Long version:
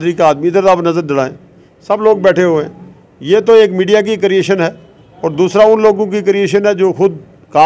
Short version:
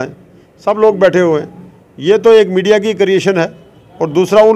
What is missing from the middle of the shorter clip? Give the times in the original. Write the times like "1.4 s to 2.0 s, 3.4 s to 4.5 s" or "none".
none